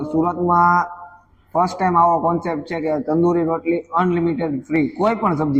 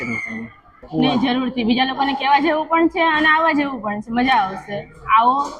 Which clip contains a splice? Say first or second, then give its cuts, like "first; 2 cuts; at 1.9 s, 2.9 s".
second; 1 cut; at 1.0 s